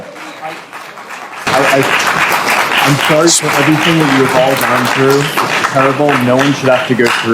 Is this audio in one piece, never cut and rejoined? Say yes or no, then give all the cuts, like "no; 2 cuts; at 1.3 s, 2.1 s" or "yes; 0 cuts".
no; 1 cut; at 1.2 s